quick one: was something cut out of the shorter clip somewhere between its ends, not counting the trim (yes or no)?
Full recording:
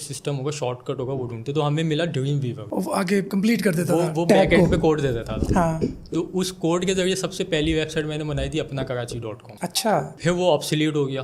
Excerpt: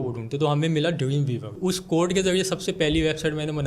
yes